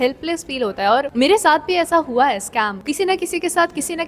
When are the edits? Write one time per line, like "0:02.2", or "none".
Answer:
0:01.1
0:02.8